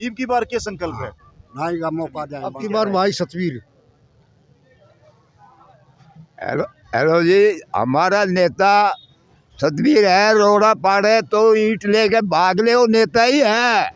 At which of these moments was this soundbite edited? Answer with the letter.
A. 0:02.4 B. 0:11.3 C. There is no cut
A